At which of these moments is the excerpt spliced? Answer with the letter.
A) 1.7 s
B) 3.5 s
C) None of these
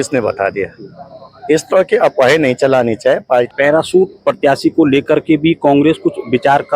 B